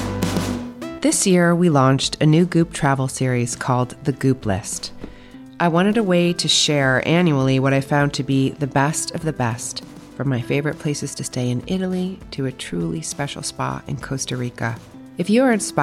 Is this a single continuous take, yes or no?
no